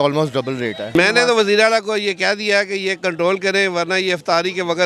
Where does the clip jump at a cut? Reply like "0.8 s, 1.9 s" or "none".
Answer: 0.9 s

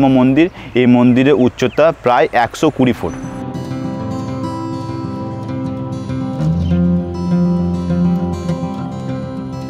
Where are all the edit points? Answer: none

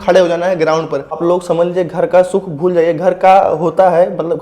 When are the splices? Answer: 1.2 s

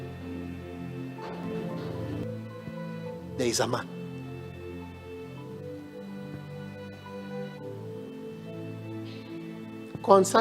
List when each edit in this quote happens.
2.2 s

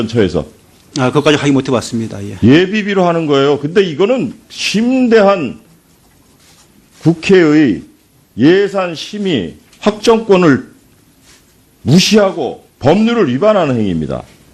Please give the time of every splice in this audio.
8.6 s

